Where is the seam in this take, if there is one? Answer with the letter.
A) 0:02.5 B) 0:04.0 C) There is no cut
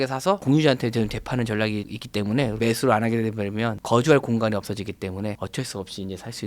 A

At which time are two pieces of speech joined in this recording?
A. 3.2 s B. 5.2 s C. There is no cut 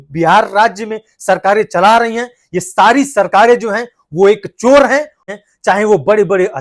B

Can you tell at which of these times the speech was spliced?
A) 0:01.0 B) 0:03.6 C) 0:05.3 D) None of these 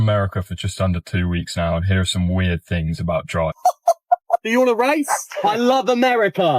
B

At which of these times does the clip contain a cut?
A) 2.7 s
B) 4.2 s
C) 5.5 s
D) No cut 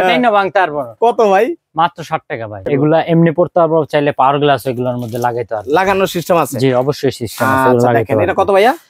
A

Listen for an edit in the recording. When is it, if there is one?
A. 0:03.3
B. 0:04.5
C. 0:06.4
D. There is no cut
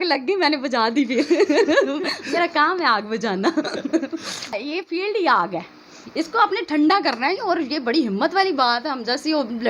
B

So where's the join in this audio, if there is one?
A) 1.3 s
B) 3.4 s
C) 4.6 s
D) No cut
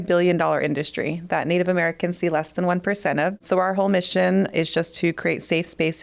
B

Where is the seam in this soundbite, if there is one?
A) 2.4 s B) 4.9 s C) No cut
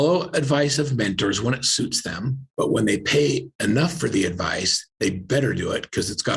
A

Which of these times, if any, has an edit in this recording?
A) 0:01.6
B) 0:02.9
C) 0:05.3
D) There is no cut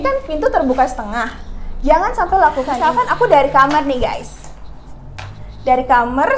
B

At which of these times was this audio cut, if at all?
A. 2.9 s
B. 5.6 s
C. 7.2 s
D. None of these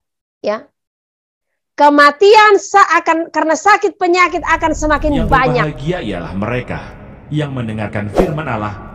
B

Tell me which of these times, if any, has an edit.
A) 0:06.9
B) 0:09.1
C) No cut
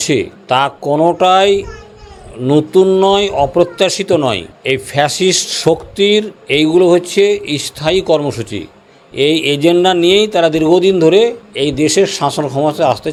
C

